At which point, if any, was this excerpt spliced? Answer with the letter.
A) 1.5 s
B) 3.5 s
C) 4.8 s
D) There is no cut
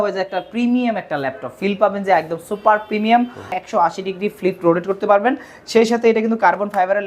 B